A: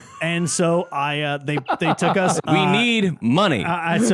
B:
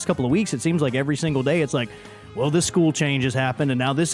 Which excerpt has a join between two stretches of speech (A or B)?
A